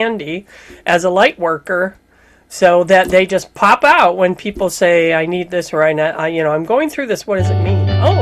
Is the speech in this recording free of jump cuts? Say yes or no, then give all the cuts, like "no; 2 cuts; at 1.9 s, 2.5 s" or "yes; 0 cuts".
yes; 0 cuts